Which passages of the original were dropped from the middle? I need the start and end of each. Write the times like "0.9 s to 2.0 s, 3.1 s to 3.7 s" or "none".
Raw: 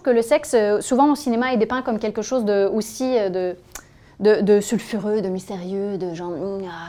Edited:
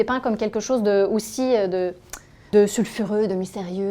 4.1 s to 4.4 s